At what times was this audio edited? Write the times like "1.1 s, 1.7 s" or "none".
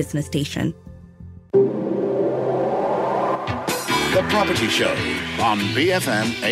1.0 s